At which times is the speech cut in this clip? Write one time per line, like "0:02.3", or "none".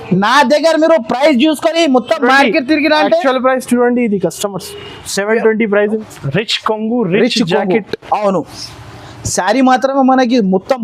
0:06.0